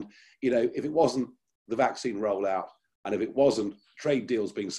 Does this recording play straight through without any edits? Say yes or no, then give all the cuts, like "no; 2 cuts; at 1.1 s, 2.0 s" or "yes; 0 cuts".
no; 1 cut; at 3.9 s